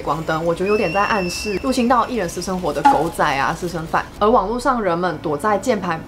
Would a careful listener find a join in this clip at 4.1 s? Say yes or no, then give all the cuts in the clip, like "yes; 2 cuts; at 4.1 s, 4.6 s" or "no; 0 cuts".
yes; 1 cut; at 4.1 s